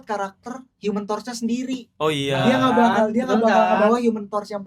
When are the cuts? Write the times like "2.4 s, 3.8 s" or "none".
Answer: none